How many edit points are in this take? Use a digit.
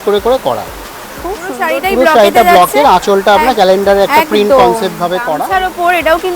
2